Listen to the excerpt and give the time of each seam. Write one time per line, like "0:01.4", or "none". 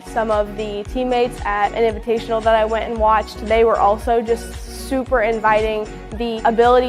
none